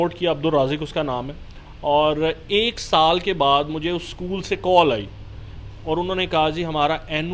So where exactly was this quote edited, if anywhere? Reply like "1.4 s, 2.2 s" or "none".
none

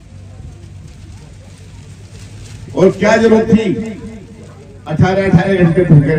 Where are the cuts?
none

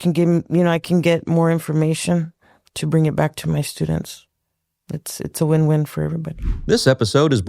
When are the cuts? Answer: 6.3 s

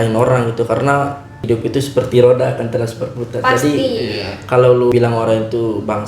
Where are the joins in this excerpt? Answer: 1.3 s, 4.9 s

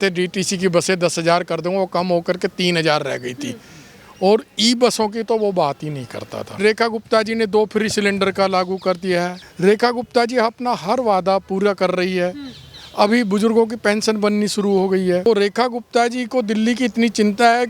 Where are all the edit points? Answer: 6.5 s, 9.4 s, 15.3 s

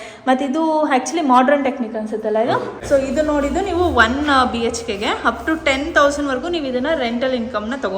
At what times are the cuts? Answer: 2.8 s

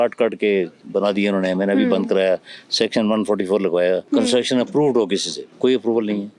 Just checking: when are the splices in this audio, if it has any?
4.0 s

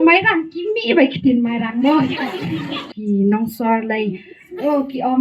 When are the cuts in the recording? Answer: 2.9 s

